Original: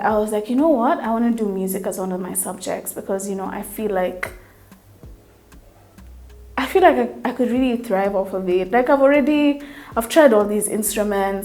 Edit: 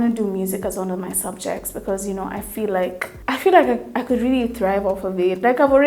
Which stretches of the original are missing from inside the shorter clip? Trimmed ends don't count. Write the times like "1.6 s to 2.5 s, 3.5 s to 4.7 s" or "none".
4.3 s to 6.4 s